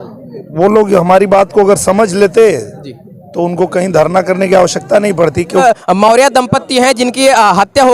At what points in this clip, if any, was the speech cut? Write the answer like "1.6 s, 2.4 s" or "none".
5.6 s